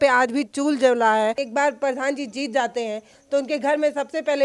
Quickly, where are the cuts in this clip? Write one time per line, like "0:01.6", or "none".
0:01.4